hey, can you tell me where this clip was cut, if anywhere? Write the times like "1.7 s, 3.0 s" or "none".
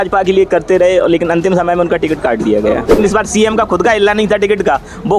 3.0 s